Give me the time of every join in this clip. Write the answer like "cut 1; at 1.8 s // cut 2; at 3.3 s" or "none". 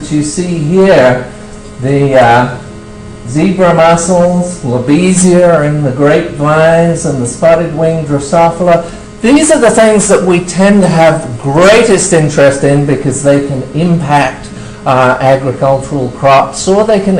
cut 1; at 2.6 s

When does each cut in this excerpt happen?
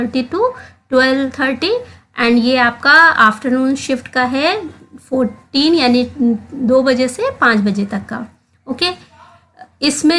none

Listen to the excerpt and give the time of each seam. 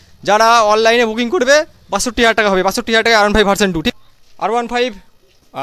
cut 1; at 3.9 s

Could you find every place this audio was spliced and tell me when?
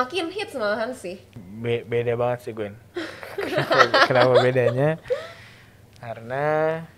cut 1; at 1.4 s

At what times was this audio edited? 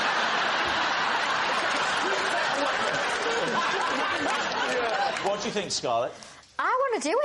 none

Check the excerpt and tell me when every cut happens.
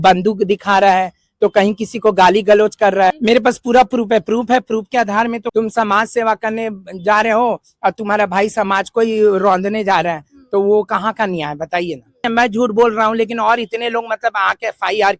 cut 1; at 3.2 s // cut 2; at 5.4 s // cut 3; at 12.2 s

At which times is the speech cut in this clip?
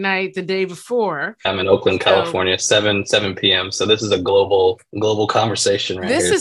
cut 1; at 1.5 s // cut 2; at 4.9 s

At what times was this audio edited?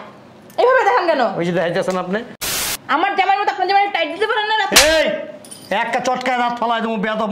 cut 1; at 2.4 s

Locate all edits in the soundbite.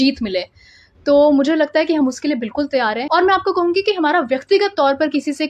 cut 1; at 3.0 s

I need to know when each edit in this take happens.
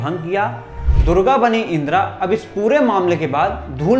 cut 1; at 1.0 s

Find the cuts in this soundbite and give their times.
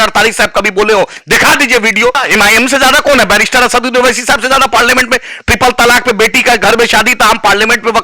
cut 1; at 2.2 s

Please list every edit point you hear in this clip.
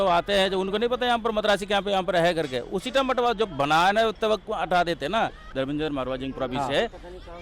cut 1; at 5.4 s

